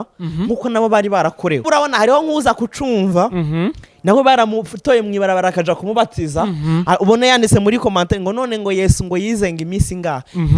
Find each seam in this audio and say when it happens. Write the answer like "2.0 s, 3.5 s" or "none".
1.6 s